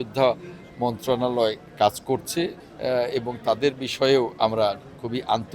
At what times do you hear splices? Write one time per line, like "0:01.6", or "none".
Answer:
0:02.7